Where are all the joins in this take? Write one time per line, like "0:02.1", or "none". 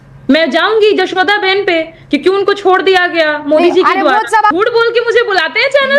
0:04.5